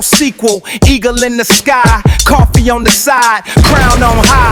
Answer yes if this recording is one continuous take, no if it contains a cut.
yes